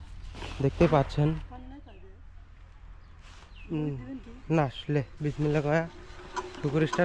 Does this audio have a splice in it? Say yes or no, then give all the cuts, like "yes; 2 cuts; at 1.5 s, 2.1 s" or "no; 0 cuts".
no; 0 cuts